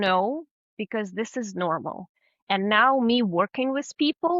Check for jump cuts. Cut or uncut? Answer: uncut